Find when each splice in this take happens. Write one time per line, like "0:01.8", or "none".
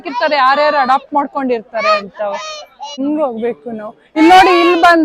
0:03.0